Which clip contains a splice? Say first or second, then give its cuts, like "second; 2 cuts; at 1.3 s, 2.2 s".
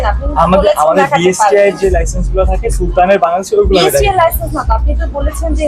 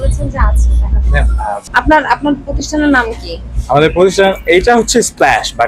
second; 1 cut; at 1.7 s